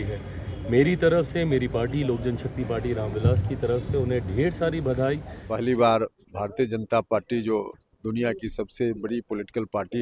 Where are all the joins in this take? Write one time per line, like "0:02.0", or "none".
0:05.4